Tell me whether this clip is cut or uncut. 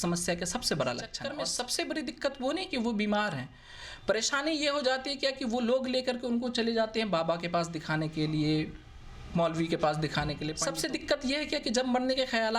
cut